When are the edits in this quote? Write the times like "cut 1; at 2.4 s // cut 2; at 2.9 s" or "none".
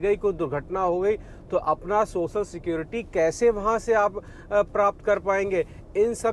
none